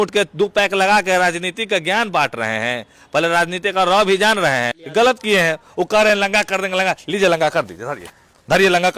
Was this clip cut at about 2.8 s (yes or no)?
no